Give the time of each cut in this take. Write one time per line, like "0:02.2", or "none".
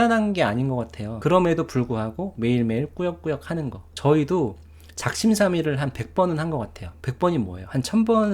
0:01.1
0:03.8